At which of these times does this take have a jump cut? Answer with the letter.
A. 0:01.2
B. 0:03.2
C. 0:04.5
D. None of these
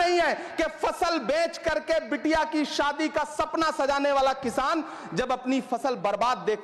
D